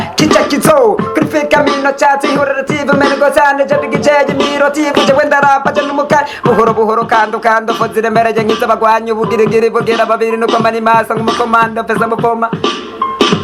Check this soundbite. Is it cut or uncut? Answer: uncut